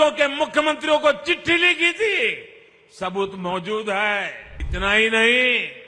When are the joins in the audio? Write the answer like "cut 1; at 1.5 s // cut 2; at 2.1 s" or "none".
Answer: cut 1; at 4.6 s